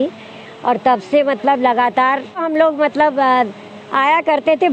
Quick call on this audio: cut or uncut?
cut